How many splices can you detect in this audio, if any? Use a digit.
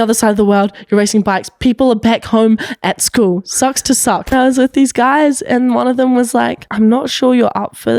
2